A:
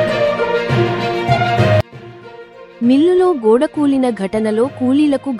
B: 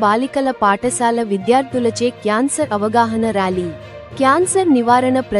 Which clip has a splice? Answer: A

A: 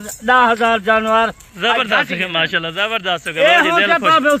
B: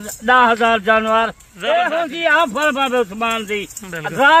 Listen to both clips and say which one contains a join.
B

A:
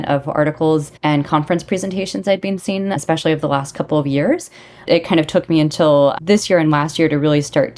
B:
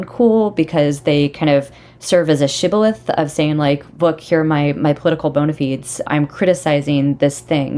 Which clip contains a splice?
A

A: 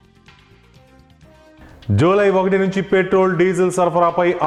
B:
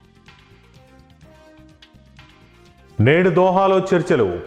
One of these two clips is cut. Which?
B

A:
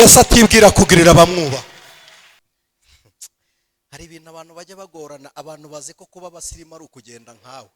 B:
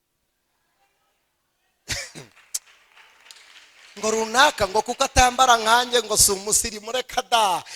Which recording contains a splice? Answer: A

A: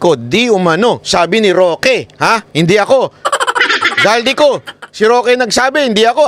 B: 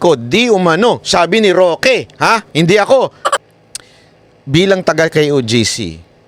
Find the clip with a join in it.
B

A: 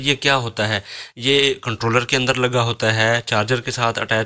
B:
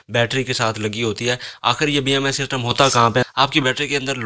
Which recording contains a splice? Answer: B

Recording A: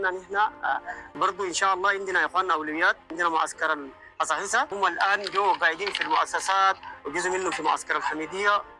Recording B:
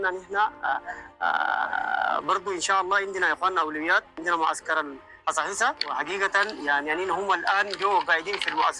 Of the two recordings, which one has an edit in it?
A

